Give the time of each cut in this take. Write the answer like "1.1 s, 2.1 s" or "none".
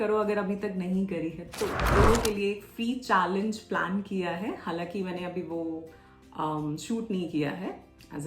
1.9 s